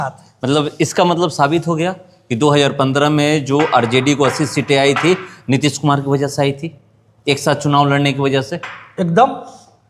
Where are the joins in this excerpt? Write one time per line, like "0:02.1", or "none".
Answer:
none